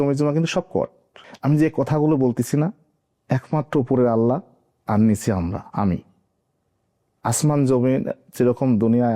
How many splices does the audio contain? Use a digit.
1